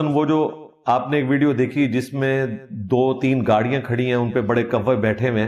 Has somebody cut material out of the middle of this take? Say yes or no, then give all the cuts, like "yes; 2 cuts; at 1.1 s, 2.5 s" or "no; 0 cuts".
no; 0 cuts